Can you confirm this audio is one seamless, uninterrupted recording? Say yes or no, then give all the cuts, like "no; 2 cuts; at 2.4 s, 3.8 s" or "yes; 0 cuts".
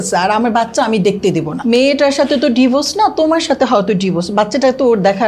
no; 1 cut; at 1.6 s